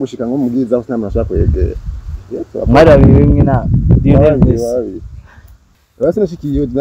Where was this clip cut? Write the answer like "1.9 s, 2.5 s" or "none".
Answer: 5.8 s